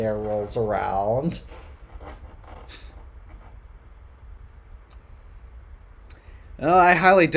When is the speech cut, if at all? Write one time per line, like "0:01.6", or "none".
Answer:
none